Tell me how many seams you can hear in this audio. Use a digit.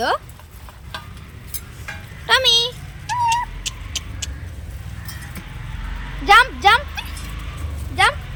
0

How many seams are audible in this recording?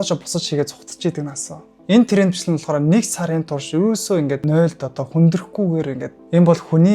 2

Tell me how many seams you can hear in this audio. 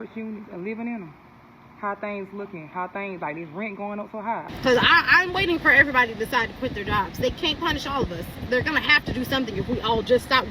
1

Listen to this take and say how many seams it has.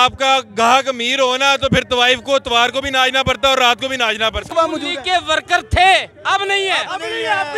1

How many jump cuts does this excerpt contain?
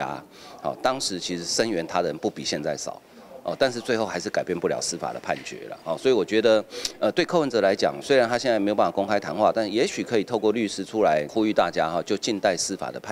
1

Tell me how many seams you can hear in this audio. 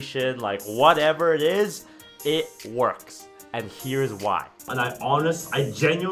1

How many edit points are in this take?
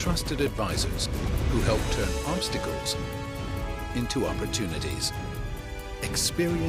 0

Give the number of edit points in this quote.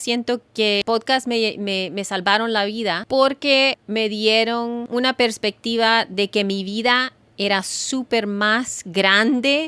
3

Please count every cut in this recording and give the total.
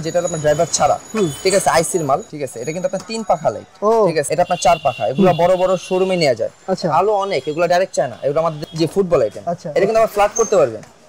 4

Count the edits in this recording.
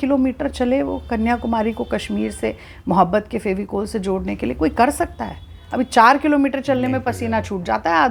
0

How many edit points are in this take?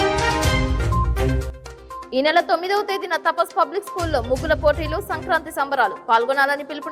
1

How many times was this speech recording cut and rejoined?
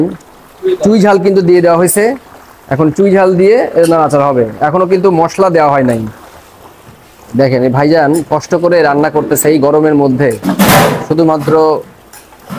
0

